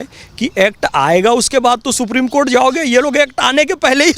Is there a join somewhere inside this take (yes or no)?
no